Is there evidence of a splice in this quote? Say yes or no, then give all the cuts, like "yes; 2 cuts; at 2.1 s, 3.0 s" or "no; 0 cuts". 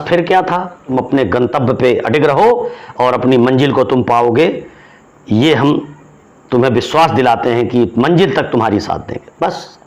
yes; 1 cut; at 0.9 s